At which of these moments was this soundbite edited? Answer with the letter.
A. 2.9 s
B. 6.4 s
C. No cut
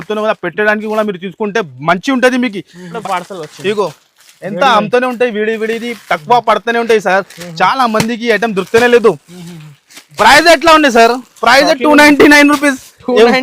A